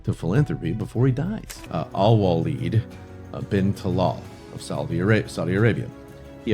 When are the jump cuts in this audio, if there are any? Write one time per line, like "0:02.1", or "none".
0:01.5

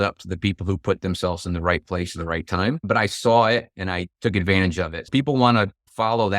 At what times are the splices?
0:02.8

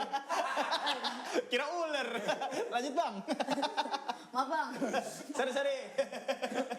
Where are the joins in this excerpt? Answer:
none

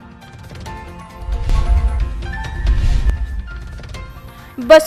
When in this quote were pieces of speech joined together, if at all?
0:01.3

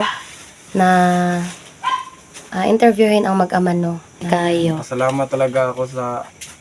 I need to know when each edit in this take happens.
0:04.4

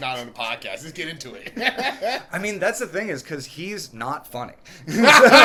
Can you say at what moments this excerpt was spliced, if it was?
none

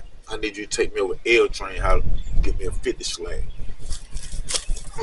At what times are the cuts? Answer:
none

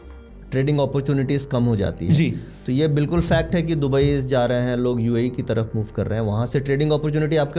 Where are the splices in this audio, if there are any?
none

